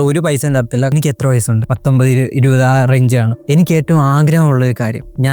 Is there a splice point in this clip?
yes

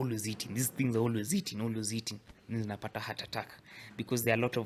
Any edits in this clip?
no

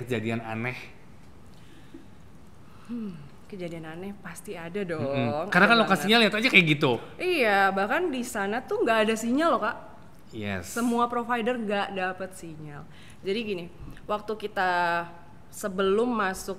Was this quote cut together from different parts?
no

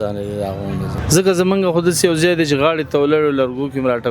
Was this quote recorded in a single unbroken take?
no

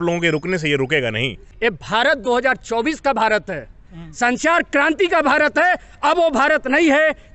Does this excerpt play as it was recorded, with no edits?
no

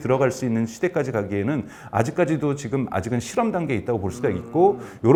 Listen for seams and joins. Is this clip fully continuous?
yes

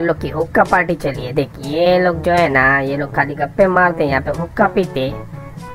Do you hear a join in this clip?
no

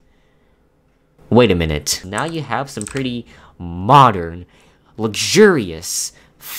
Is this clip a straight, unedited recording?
no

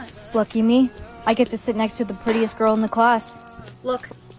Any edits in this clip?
no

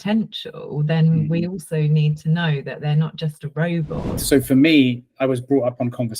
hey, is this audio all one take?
no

